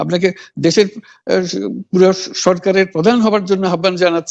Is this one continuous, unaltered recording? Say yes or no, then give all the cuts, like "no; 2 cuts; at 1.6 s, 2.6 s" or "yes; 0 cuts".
yes; 0 cuts